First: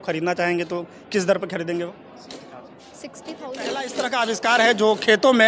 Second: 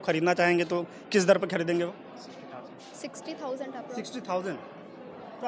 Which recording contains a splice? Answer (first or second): first